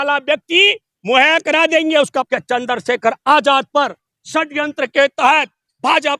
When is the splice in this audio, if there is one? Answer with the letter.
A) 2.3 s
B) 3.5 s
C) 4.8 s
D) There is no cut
A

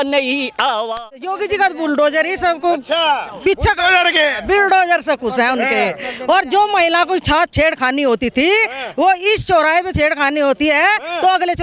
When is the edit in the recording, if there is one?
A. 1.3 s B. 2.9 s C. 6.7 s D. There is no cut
A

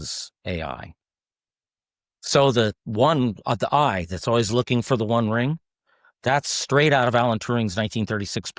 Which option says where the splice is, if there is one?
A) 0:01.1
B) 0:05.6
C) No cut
C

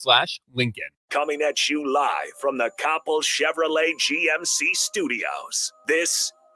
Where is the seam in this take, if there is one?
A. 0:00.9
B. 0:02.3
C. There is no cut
A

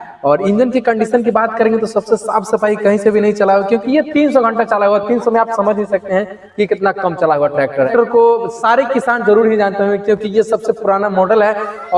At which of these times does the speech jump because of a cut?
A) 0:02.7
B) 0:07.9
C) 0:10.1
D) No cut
B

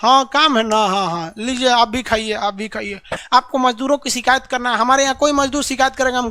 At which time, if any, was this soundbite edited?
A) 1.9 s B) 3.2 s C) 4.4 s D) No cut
B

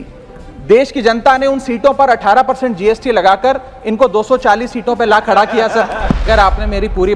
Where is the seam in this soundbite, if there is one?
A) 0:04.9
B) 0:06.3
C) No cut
B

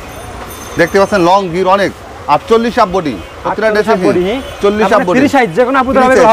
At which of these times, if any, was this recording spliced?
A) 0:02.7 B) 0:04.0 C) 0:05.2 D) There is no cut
D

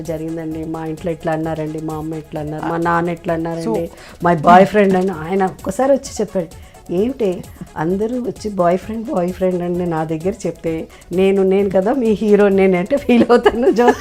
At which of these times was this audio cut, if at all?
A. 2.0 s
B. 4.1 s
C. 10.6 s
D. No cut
D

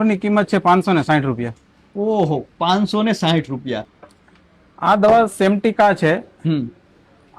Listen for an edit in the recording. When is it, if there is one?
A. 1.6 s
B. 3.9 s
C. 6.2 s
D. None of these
B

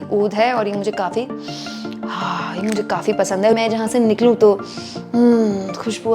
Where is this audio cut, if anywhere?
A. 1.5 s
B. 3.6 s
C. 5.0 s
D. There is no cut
B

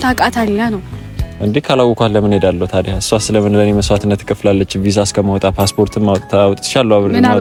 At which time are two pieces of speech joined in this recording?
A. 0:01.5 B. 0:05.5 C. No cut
C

